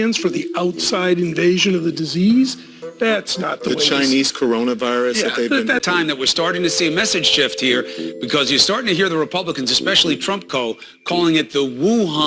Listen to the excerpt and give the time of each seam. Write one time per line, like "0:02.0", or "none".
0:05.9